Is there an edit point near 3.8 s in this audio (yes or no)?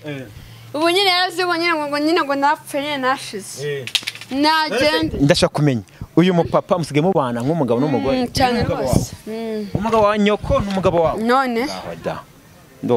no